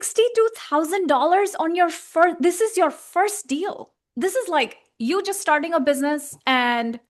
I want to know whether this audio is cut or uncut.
uncut